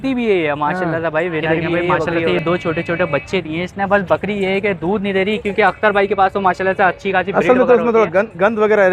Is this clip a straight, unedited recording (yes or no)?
no